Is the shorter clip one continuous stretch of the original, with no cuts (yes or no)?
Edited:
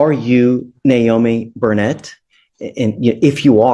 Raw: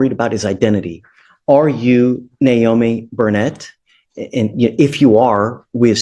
yes